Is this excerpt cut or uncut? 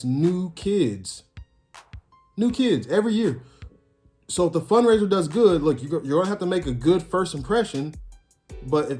uncut